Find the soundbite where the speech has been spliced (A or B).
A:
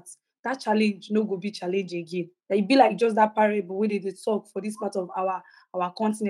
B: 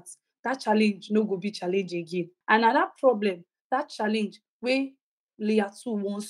B